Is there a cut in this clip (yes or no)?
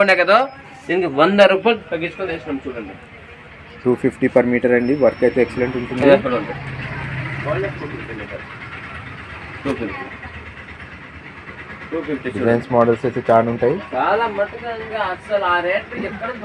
no